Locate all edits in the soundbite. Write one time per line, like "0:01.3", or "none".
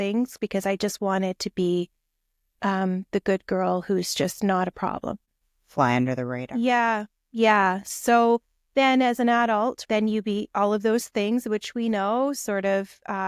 0:05.3
0:09.8

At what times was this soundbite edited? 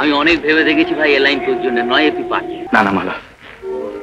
0:02.6

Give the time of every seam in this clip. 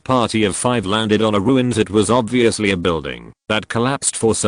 0:01.9

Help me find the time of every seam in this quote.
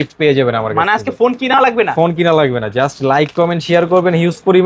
none

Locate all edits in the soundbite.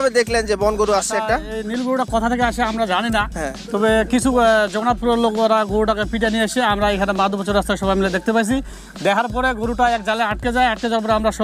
none

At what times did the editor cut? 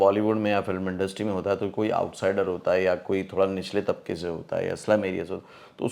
none

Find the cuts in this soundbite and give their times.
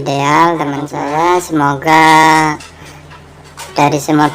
0:01.0

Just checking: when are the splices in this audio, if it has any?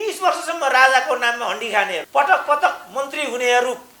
0:02.0

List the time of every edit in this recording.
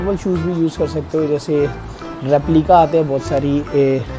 none

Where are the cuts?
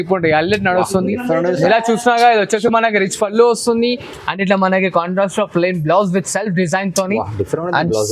none

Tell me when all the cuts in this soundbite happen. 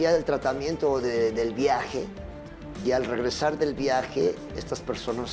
none

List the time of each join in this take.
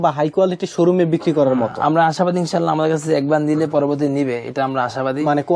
none

